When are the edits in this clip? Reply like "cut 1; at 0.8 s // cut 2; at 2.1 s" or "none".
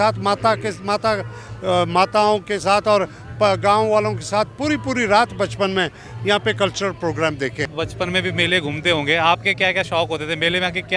cut 1; at 7.7 s